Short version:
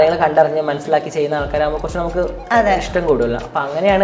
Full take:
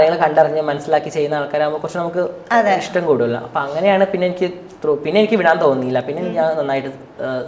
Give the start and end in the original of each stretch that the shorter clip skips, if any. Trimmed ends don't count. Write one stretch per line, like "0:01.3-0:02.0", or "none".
none